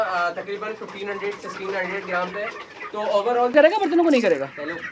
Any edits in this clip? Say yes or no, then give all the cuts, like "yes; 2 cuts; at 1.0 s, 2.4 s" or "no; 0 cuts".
yes; 1 cut; at 3.5 s